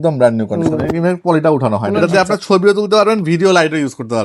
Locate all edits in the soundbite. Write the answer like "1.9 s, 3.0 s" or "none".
1.9 s